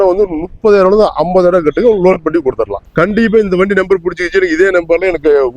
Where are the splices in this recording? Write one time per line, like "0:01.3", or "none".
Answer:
0:02.7

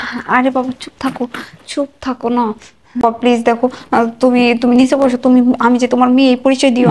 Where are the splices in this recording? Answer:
0:03.0

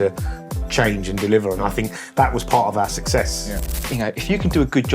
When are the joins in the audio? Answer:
0:03.8

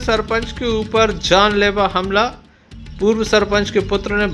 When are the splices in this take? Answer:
none

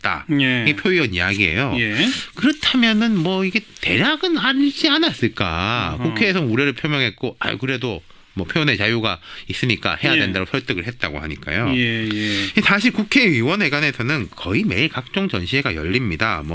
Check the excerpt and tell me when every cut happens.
none

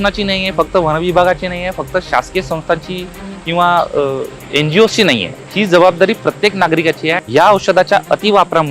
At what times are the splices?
0:04.4
0:05.4
0:07.2

